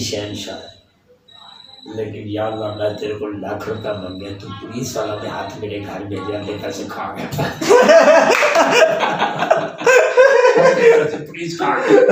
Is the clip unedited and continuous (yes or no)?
yes